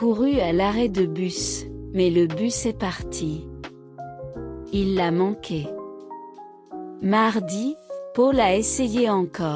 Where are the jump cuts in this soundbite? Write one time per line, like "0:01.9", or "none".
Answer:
0:01.8